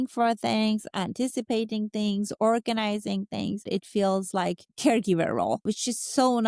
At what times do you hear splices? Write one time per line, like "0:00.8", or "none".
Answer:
0:03.6
0:05.6